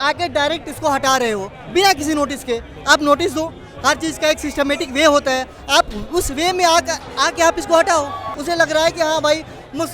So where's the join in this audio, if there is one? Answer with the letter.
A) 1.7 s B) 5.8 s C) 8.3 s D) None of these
C